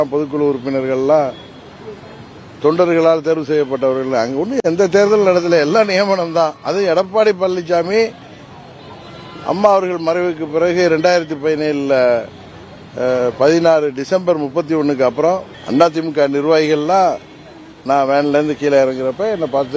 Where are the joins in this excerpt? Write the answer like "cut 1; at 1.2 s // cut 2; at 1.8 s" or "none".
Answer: cut 1; at 15.5 s

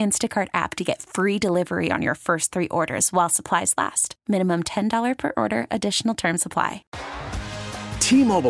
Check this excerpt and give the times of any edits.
cut 1; at 6.8 s

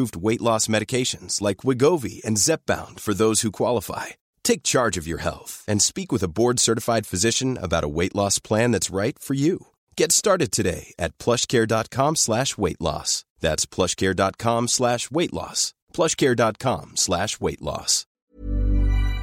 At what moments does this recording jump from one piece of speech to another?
cut 1; at 18.3 s

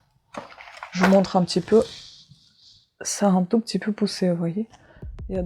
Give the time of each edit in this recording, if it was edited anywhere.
none

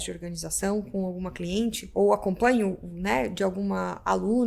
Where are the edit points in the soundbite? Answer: cut 1; at 1.8 s

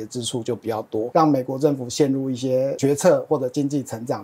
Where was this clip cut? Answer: cut 1; at 1.0 s // cut 2; at 2.8 s

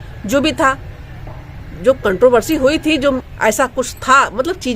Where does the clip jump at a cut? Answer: cut 1; at 3.2 s

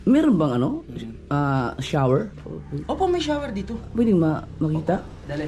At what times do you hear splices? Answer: none

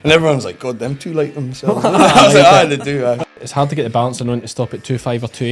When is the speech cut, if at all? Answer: cut 1; at 3.2 s

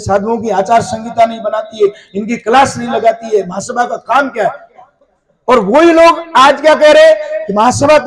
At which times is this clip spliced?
none

